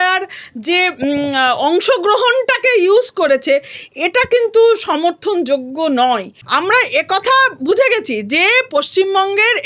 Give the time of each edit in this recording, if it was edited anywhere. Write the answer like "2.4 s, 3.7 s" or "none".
6.4 s